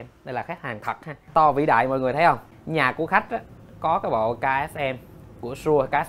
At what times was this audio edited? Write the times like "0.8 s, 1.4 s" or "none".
1.3 s, 2.5 s